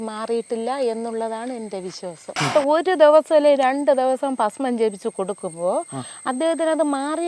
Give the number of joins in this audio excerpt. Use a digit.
1